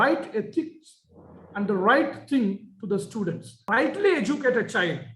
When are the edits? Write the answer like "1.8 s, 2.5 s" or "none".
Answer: 3.5 s